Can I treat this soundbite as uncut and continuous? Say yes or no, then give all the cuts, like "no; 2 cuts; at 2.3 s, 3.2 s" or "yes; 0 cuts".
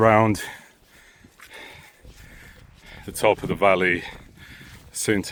yes; 0 cuts